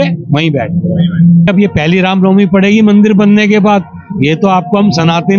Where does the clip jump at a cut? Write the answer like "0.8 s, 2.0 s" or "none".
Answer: 1.5 s